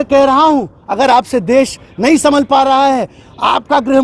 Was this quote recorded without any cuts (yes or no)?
yes